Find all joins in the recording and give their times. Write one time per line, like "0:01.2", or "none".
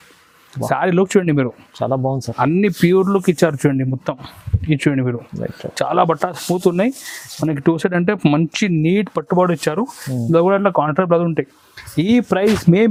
none